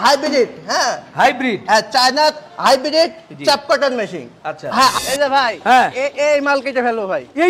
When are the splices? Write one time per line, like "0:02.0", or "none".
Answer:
0:04.9